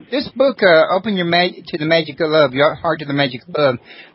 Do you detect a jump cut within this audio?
yes; 1 cut; at 1.6 s

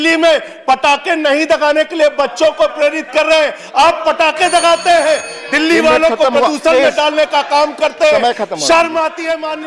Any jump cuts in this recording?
no; 0 cuts

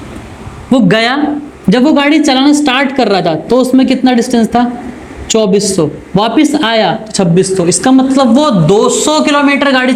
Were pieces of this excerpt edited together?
no; 0 cuts

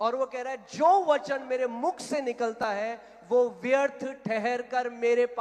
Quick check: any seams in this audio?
no; 0 cuts

